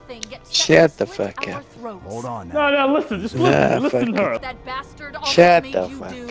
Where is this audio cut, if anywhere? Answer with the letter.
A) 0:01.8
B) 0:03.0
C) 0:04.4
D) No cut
C